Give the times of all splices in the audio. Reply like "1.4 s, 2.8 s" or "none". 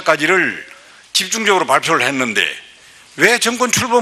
none

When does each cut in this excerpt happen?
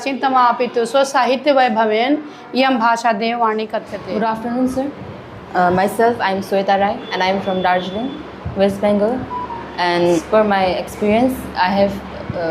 3.9 s, 10.2 s

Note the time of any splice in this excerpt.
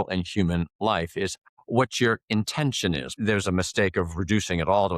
1.4 s, 3.1 s

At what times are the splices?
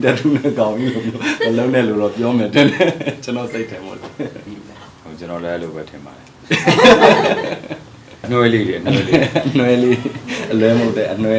8.2 s

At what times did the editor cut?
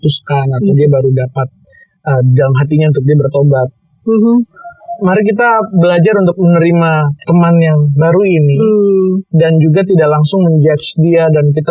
none

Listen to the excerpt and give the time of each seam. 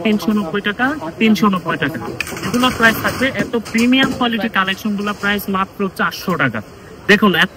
none

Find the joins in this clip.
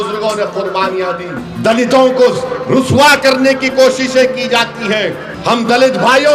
1.4 s, 5.3 s

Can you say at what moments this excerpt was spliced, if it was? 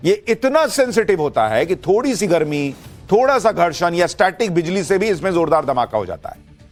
none

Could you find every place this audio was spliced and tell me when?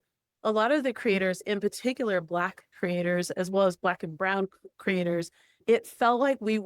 1.4 s, 5.6 s

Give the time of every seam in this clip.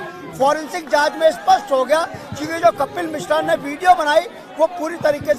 none

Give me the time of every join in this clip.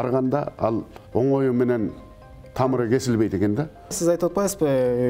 0.9 s, 3.9 s

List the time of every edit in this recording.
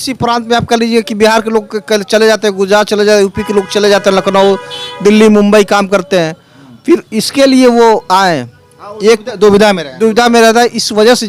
none

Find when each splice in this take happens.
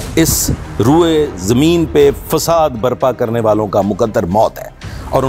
none

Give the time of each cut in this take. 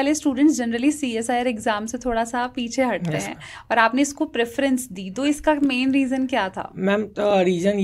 none

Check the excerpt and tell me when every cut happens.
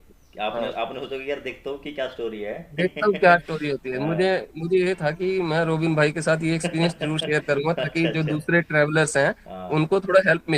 none

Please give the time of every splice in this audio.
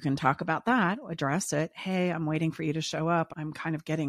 none

